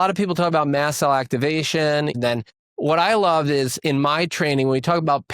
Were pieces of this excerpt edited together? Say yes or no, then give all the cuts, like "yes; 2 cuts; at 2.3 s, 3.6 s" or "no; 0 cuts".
yes; 1 cut; at 2.2 s